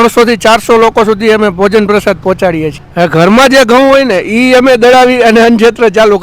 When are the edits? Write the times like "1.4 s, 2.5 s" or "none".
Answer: 2.8 s